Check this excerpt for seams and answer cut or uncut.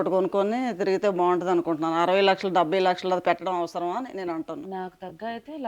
uncut